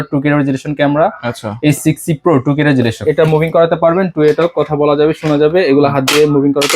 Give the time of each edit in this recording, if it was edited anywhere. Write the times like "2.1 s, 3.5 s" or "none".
3.0 s

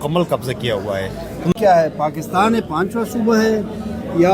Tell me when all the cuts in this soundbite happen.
1.5 s

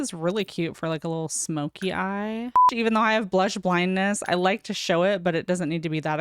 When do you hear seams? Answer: 2.7 s

